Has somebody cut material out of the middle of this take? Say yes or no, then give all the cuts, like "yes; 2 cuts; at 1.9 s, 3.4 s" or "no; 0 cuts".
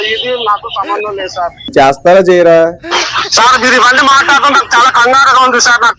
yes; 2 cuts; at 1.7 s, 2.9 s